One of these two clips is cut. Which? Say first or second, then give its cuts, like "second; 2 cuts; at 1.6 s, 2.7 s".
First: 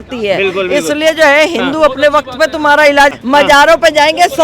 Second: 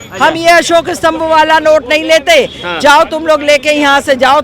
first; 1 cut; at 3.1 s